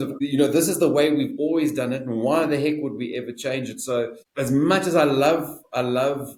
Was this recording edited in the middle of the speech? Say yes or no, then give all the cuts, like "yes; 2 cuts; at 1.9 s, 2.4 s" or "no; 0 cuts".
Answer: no; 0 cuts